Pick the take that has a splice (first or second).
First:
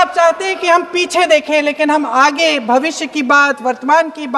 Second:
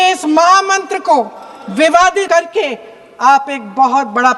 second